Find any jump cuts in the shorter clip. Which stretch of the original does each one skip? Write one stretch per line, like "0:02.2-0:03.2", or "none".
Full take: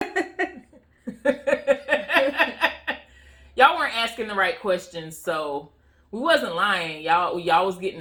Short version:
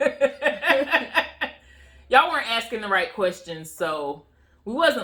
none